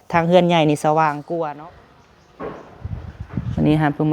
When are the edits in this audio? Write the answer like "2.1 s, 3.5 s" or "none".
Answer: 1.5 s